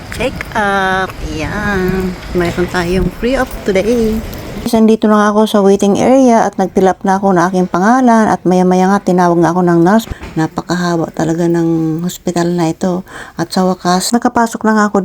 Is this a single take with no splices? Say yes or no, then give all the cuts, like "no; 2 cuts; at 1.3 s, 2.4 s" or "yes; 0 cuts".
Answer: no; 4 cuts; at 2.2 s, 4.7 s, 10.1 s, 14.1 s